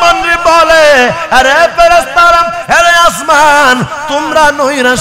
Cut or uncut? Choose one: uncut